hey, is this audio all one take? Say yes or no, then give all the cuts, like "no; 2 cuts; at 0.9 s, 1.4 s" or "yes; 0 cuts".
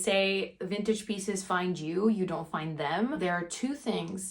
no; 1 cut; at 3.2 s